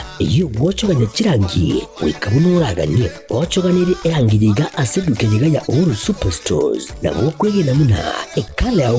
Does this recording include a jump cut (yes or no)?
yes